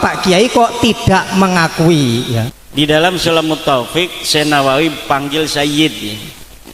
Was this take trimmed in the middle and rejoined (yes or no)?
no